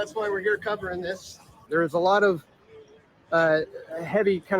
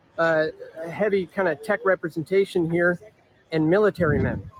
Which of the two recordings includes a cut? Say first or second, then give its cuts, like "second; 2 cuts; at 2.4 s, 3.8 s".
first; 1 cut; at 1.6 s